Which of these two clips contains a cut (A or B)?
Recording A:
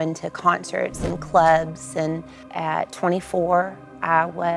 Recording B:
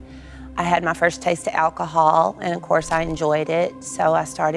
A